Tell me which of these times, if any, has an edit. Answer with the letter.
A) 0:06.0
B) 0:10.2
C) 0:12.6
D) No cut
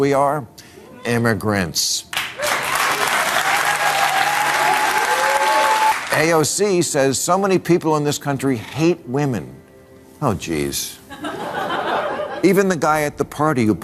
A